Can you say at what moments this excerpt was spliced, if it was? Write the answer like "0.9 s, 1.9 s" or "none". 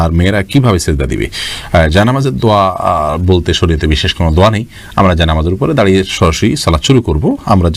none